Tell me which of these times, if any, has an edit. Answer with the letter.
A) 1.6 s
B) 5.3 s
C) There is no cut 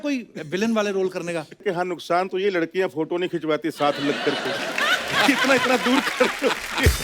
A